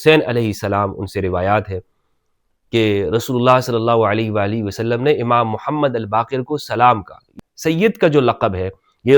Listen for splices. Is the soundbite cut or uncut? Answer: cut